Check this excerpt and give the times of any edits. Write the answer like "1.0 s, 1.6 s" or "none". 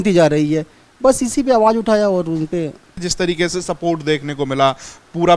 3.1 s